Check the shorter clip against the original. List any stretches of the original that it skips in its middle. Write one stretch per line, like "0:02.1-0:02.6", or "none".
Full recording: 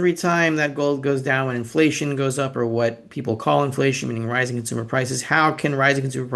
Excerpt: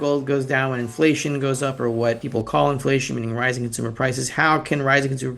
0:03.0-0:03.2